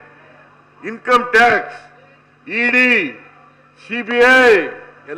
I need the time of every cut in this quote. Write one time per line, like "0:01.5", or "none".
none